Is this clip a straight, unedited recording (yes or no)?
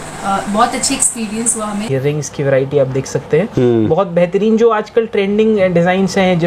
no